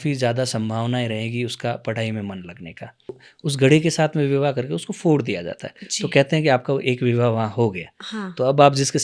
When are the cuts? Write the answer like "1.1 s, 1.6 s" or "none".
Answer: 3.3 s